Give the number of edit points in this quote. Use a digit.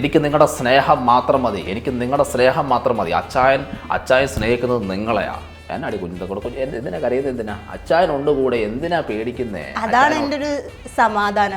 1